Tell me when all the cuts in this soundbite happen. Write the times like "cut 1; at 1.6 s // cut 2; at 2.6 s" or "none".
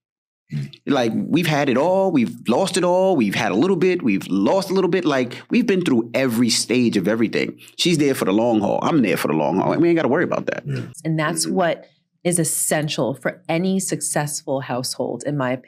cut 1; at 11.0 s